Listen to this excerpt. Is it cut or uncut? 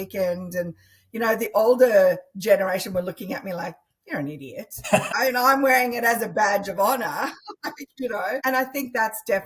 cut